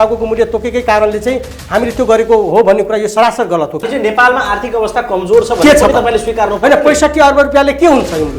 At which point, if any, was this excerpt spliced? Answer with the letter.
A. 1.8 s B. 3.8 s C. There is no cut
B